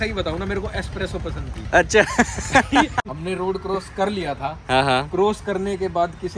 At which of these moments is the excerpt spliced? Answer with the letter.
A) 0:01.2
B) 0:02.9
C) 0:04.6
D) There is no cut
B